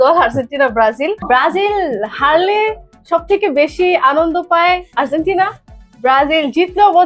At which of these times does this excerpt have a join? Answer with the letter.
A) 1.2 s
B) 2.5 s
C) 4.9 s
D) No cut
A